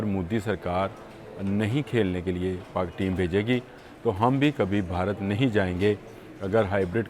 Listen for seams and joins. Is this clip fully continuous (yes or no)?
yes